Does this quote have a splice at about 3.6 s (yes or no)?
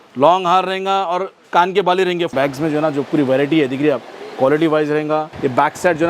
no